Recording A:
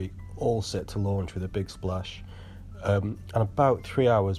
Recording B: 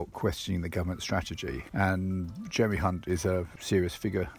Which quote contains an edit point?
B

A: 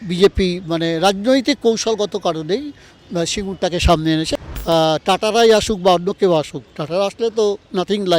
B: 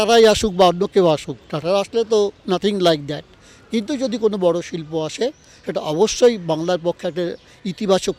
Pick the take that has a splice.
A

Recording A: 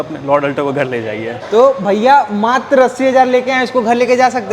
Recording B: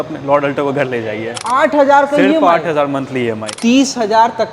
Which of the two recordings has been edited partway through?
B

